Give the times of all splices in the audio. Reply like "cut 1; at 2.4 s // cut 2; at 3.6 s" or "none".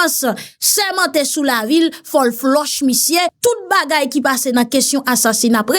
cut 1; at 3.3 s